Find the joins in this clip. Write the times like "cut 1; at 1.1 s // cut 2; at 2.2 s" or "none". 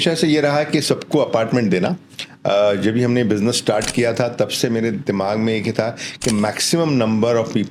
none